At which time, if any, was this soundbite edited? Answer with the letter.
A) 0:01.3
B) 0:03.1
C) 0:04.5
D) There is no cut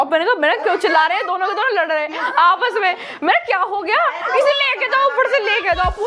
D